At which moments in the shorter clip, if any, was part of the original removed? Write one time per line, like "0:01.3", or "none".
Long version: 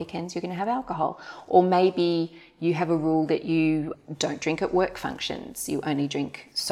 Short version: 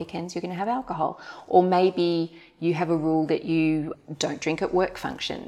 none